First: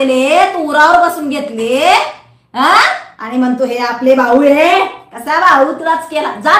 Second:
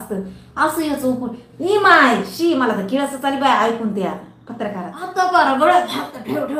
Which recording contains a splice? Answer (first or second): second